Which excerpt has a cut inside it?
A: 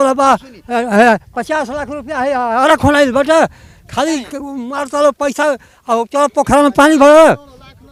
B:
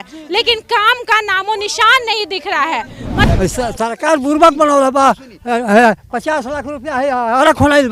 B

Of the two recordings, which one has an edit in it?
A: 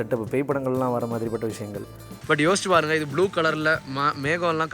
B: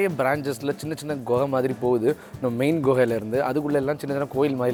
A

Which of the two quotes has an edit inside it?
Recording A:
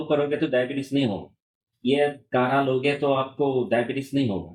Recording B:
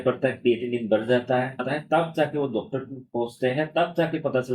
B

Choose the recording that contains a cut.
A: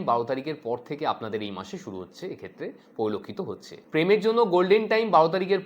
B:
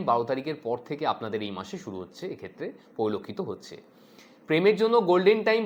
A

